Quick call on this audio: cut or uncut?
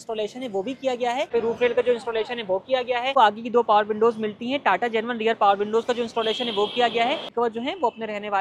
cut